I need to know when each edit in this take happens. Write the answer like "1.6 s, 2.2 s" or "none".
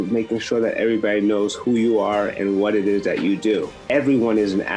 3.9 s